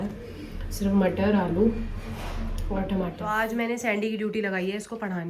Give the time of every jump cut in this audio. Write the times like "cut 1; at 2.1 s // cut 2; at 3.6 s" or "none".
cut 1; at 3.2 s